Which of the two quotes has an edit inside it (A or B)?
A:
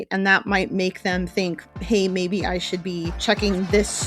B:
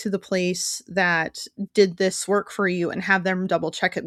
A